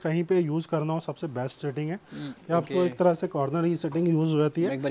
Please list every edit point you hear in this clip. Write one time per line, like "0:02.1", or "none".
none